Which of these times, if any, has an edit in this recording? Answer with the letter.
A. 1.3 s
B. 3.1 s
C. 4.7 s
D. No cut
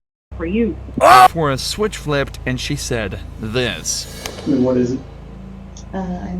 A